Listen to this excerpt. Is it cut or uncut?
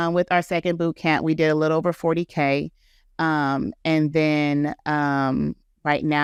uncut